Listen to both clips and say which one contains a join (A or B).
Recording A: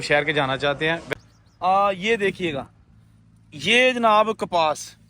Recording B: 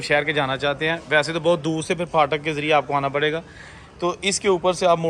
A